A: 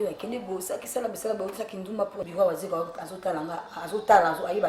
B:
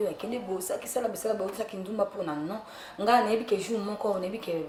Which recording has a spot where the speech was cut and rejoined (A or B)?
A